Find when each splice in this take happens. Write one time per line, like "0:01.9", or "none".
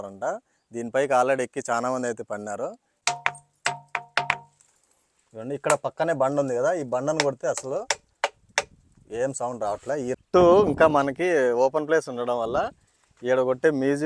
0:02.9
0:10.1